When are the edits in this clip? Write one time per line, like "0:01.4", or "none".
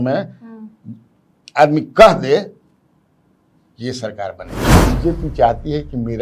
0:04.8